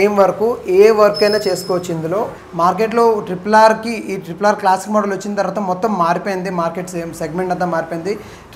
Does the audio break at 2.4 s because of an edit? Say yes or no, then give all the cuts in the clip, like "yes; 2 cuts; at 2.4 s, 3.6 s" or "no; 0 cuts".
yes; 1 cut; at 2.4 s